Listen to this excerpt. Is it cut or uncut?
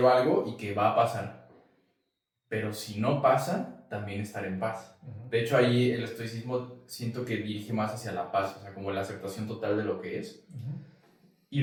uncut